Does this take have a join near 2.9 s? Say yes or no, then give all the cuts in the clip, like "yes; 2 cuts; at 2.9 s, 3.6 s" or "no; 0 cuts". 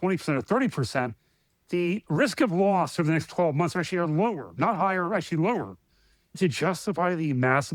no; 1 cut; at 6.4 s